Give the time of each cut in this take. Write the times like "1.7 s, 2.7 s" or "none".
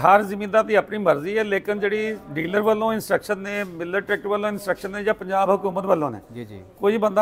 none